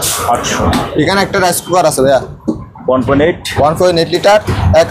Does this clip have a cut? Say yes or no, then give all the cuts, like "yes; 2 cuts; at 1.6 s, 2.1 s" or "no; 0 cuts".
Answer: no; 0 cuts